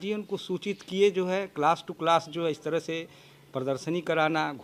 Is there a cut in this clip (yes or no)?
no